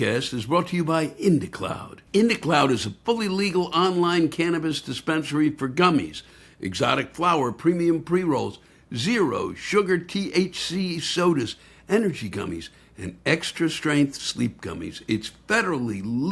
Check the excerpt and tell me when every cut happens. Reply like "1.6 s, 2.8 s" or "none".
1.9 s